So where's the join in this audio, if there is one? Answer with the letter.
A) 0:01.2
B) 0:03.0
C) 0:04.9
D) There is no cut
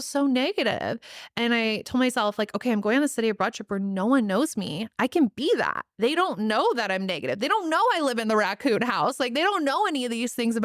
D